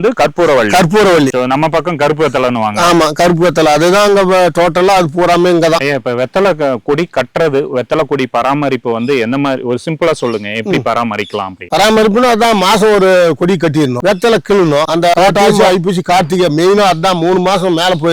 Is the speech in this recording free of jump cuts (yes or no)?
yes